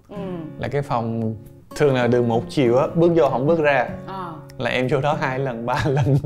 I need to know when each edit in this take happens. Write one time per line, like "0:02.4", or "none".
none